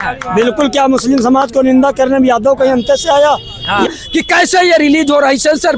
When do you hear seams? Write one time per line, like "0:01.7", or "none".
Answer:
0:03.9